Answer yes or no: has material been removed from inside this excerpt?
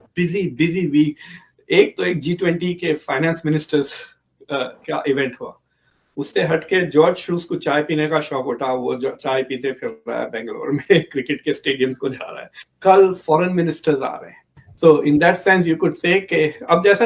yes